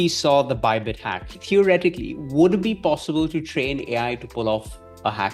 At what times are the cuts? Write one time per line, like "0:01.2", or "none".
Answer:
0:01.3